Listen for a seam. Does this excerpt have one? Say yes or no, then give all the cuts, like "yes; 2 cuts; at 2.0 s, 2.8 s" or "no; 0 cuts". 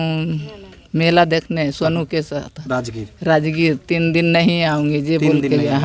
no; 0 cuts